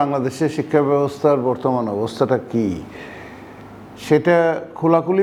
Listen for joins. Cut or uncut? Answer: uncut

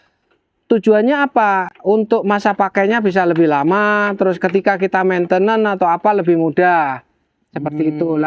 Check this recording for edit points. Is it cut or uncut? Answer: uncut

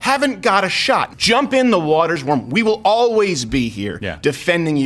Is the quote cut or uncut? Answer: cut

